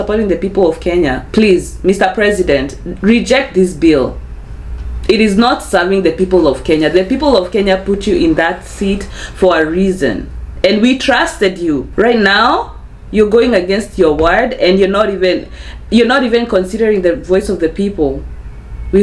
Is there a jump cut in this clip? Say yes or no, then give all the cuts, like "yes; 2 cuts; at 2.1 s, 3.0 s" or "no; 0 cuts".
yes; 2 cuts; at 1.2 s, 11.9 s